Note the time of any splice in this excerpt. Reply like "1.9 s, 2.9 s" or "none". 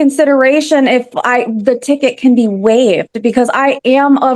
none